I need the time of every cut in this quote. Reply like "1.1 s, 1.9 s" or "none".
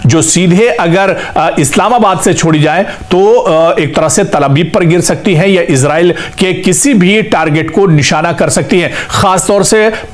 none

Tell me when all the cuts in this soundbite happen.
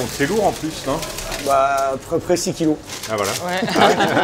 none

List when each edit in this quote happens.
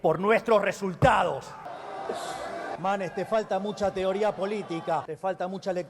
1.7 s

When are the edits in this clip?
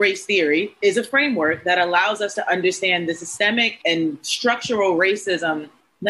none

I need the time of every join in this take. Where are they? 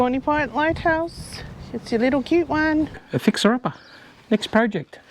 3.0 s

